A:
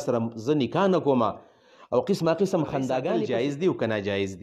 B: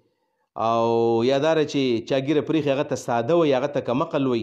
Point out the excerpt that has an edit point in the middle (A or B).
A